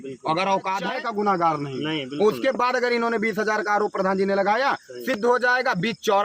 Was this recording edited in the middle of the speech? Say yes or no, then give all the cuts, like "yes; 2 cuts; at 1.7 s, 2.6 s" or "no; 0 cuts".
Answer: yes; 1 cut; at 0.9 s